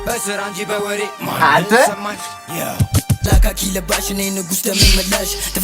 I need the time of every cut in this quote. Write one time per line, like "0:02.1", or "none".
0:03.2